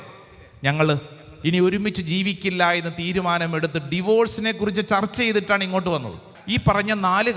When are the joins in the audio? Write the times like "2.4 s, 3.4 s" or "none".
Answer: 6.3 s